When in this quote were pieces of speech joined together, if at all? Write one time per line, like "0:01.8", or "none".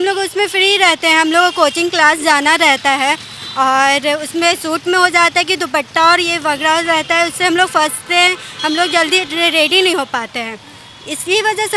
none